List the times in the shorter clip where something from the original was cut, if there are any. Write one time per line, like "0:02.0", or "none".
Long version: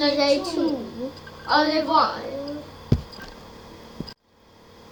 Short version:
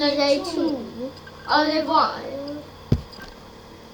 none